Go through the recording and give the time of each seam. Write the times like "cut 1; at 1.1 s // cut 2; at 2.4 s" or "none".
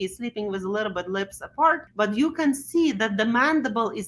cut 1; at 1.9 s

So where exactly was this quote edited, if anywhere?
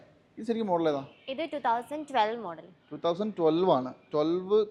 none

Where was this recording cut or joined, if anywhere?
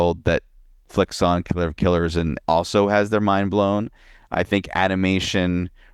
cut 1; at 2.4 s

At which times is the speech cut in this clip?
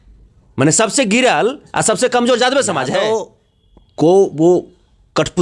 cut 1; at 3.0 s

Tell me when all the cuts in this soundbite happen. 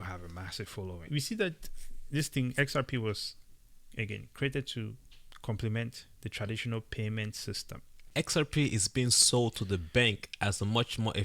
cut 1; at 1.1 s // cut 2; at 7.9 s

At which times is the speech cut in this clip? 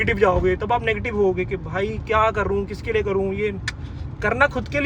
none

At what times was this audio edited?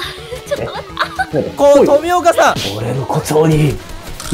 cut 1; at 2.7 s

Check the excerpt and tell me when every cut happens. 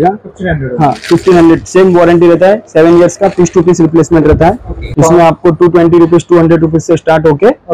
cut 1; at 4.8 s

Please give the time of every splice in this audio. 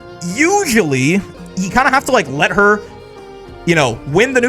cut 1; at 1.3 s

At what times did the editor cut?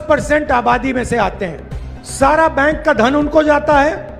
cut 1; at 2.0 s

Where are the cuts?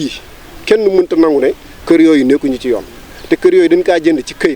none

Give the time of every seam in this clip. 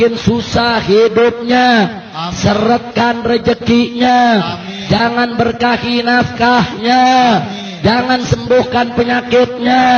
none

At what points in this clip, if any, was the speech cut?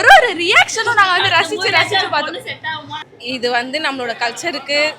cut 1; at 3.1 s

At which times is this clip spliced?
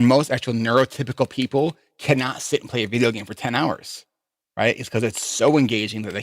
none

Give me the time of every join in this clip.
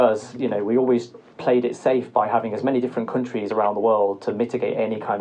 none

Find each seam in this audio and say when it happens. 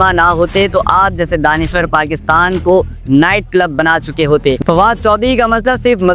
cut 1; at 4.6 s

